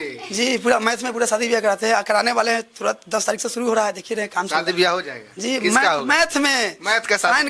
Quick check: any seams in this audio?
no; 0 cuts

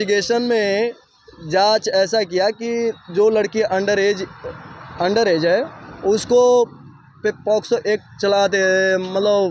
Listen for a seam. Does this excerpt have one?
no; 0 cuts

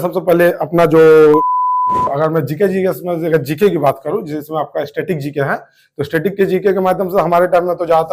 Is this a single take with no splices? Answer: no; 1 cut; at 1.6 s

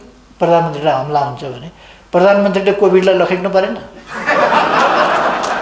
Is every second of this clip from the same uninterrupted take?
yes; 0 cuts

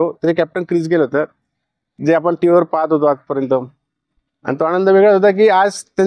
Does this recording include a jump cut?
yes; 1 cut; at 1.8 s

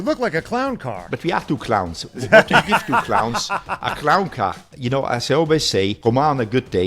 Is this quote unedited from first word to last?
no; 3 cuts; at 1.0 s, 4.7 s, 5.9 s

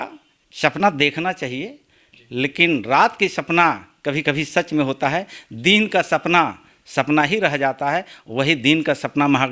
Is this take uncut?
yes; 0 cuts

